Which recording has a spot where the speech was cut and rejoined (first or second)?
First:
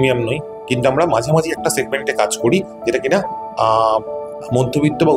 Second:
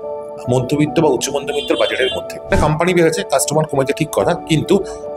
second